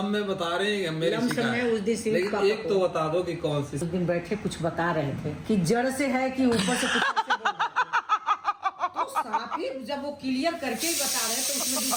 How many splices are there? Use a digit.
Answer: 0